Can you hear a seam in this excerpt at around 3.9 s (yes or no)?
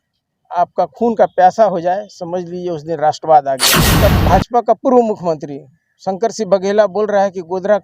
yes